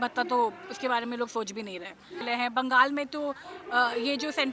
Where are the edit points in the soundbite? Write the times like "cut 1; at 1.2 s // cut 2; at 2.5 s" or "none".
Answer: cut 1; at 2.2 s